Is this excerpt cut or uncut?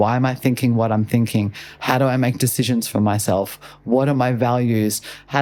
uncut